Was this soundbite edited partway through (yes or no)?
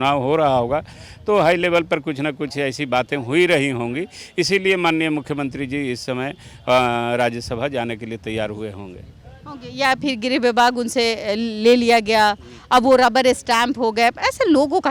no